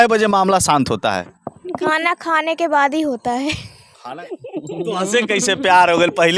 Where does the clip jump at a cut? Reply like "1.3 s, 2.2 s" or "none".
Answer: 4.3 s